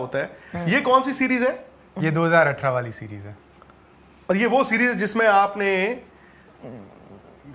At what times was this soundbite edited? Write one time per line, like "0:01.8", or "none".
none